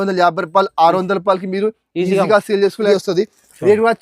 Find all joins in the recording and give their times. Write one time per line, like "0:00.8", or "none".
0:02.9